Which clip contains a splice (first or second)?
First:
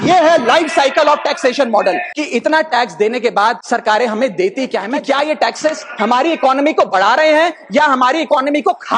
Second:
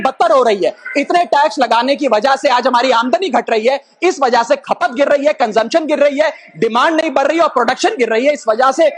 first